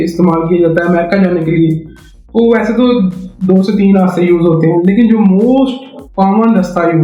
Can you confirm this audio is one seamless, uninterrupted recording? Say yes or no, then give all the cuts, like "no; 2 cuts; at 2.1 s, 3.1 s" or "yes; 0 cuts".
yes; 0 cuts